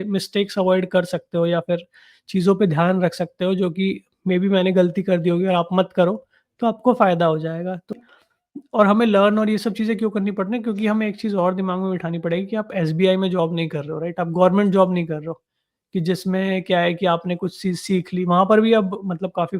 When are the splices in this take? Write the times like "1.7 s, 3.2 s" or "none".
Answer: 7.9 s